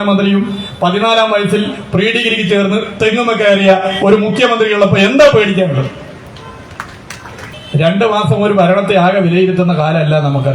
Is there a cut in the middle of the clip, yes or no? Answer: yes